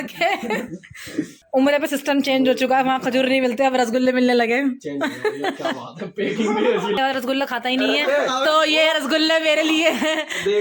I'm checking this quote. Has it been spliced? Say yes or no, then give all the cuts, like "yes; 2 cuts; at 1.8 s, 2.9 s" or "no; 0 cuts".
yes; 2 cuts; at 1.4 s, 7.0 s